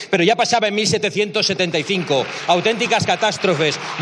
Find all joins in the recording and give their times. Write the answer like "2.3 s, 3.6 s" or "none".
none